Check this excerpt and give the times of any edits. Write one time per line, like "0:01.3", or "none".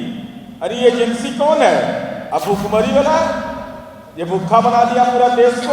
0:02.2